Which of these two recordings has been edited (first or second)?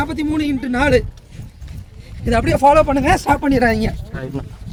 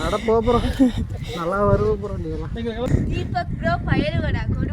second